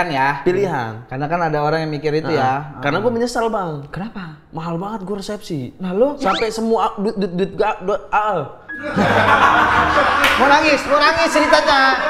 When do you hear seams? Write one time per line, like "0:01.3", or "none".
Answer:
none